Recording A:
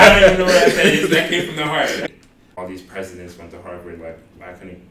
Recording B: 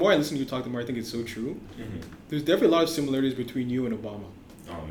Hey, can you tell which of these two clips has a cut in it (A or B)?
A